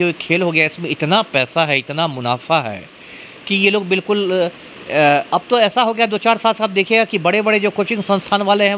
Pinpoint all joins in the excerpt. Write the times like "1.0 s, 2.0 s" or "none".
none